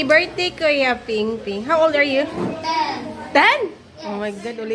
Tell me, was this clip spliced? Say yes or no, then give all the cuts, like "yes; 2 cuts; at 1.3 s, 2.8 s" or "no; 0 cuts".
no; 0 cuts